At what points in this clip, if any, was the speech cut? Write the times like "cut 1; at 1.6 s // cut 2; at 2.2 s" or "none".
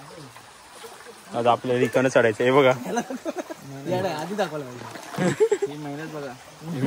none